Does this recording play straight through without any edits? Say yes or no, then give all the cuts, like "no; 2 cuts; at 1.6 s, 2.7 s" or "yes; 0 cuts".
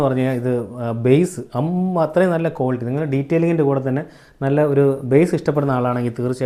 yes; 0 cuts